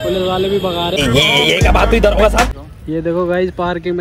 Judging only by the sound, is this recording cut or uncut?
cut